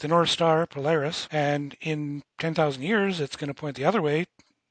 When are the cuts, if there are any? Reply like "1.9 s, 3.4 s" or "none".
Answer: 1.2 s